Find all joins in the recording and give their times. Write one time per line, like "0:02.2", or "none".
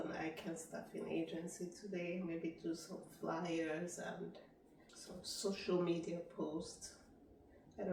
none